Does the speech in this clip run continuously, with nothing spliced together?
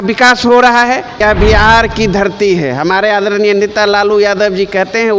no; 1 cut; at 1.2 s

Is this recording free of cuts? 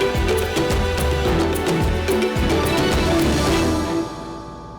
no; 1 cut; at 1.7 s

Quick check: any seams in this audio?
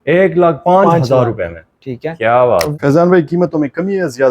yes; 1 cut; at 2.7 s

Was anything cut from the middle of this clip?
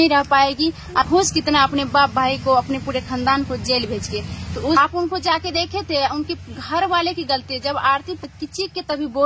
yes; 3 cuts; at 1.0 s, 4.8 s, 8.2 s

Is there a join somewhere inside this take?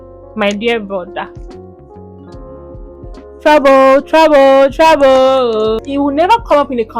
yes; 1 cut; at 5.8 s

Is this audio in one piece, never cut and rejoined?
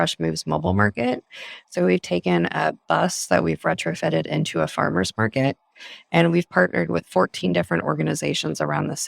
yes; 0 cuts

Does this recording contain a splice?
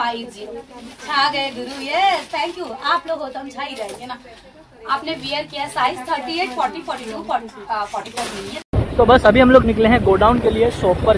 no; 0 cuts

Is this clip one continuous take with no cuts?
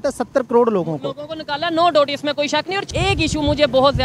no; 1 cut; at 2.9 s

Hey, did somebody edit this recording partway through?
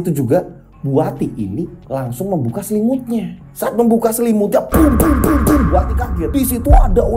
no; 0 cuts

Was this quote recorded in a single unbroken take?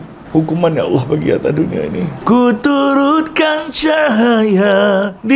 no; 1 cut; at 2.2 s

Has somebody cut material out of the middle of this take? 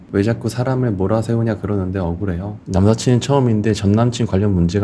yes; 1 cut; at 2.6 s

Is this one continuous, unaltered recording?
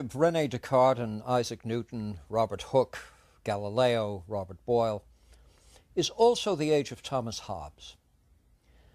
yes; 0 cuts

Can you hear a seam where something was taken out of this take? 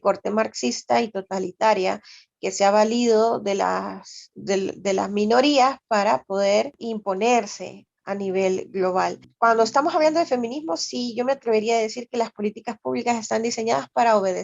yes; 2 cuts; at 6.8 s, 9.2 s

